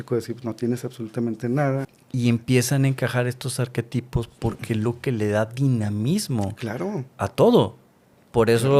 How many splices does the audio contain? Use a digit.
1